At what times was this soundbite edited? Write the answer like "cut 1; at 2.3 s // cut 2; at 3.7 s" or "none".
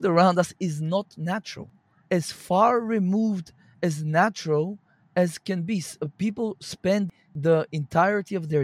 cut 1; at 1.7 s // cut 2; at 7.2 s

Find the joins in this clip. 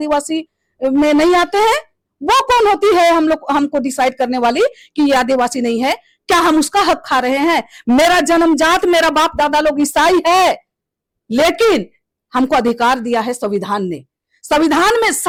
none

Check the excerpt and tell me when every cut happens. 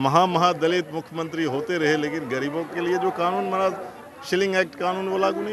none

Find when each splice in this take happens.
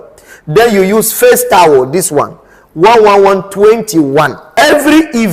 cut 1; at 4.4 s

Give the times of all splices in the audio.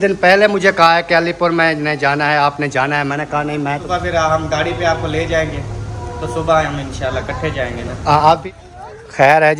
cut 1; at 3.8 s // cut 2; at 8.4 s

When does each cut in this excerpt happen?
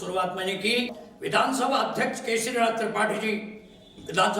cut 1; at 1.0 s

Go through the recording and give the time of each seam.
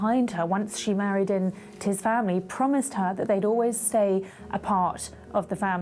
none

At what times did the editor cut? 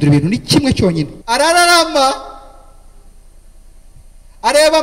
cut 1; at 1.2 s

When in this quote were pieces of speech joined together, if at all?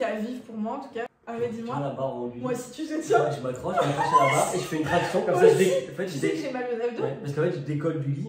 cut 1; at 1.2 s

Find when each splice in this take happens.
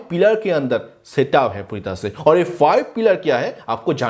none

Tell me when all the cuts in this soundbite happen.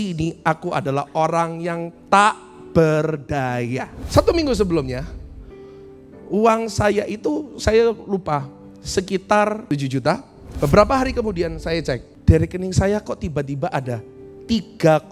cut 1; at 3.9 s // cut 2; at 9.9 s // cut 3; at 12.1 s

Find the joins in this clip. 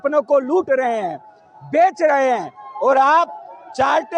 none

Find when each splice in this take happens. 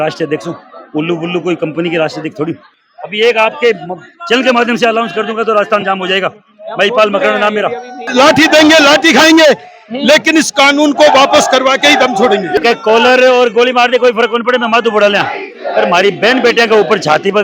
cut 1; at 2.7 s // cut 2; at 8.1 s // cut 3; at 12.6 s

